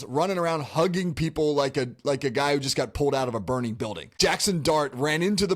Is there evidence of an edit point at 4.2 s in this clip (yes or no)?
yes